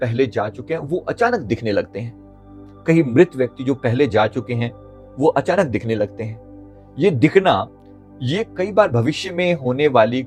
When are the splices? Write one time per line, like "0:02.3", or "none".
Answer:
none